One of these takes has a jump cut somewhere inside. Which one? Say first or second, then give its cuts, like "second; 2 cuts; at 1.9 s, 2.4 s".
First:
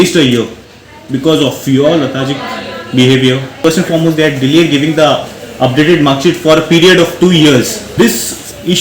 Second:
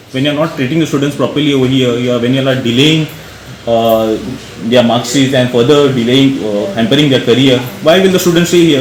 first; 2 cuts; at 3.5 s, 7.8 s